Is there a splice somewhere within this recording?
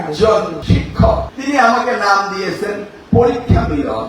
yes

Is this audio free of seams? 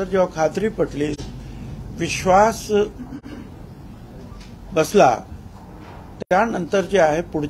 yes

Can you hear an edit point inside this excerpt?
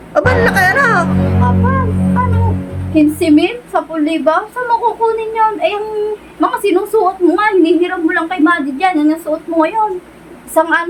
no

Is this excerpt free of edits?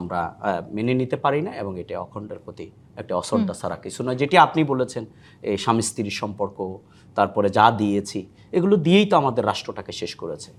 yes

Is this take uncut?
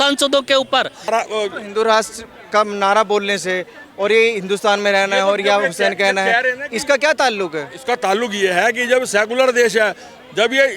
no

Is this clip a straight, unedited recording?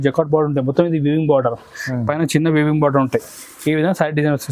yes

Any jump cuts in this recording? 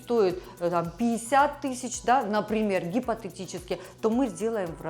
no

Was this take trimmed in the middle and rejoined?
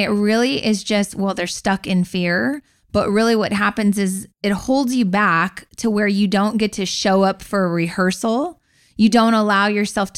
no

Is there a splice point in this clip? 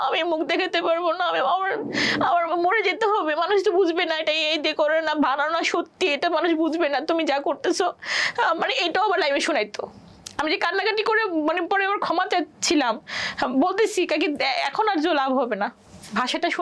no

